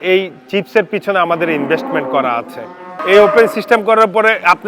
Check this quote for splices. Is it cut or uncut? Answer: cut